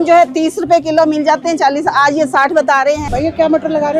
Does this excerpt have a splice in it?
yes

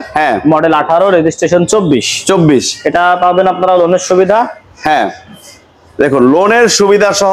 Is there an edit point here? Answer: no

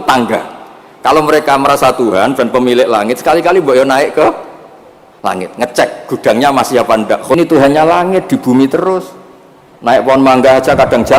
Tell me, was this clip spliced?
yes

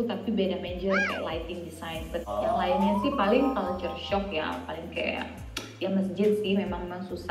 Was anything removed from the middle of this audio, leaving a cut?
yes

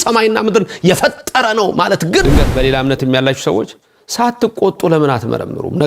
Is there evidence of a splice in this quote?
yes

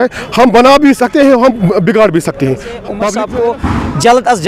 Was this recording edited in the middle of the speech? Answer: yes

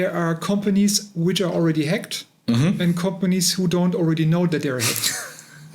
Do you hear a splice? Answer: no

